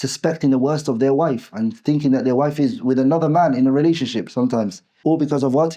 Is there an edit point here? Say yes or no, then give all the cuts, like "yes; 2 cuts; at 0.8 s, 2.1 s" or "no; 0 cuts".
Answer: yes; 1 cut; at 4.8 s